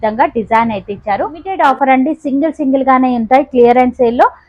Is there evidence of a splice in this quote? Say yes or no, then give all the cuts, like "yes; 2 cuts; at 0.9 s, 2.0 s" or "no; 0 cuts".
yes; 1 cut; at 1.5 s